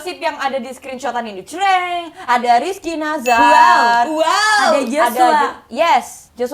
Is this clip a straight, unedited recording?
yes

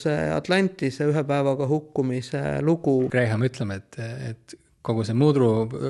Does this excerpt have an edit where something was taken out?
yes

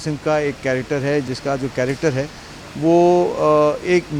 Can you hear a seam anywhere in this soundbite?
yes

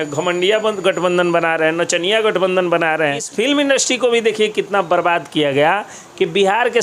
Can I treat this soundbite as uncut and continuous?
no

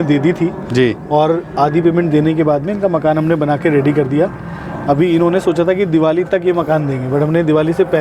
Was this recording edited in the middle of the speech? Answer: no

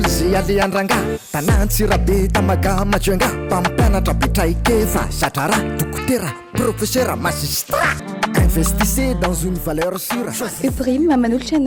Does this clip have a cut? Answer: no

